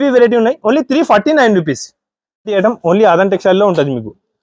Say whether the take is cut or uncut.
cut